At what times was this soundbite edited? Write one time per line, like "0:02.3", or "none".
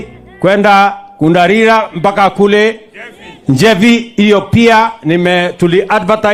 none